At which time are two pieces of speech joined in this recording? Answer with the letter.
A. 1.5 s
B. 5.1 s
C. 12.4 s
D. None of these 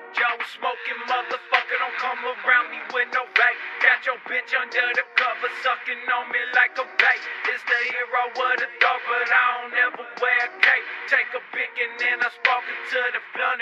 D